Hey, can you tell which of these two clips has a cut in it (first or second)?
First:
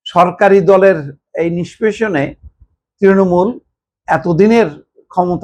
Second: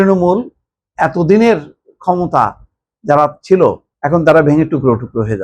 second